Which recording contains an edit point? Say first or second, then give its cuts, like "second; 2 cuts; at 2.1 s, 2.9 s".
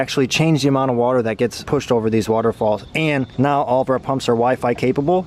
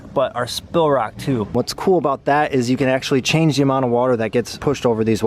second; 1 cut; at 1.5 s